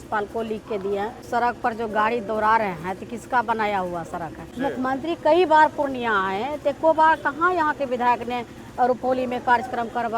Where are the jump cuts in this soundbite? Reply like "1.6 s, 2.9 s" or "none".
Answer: 1.2 s, 4.4 s